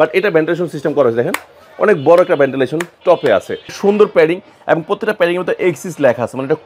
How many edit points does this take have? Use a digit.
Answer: 1